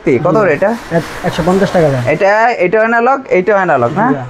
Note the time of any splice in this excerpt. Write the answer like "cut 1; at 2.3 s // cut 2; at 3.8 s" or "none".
none